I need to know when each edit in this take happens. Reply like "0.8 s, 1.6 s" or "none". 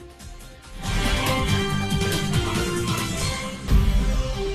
3.6 s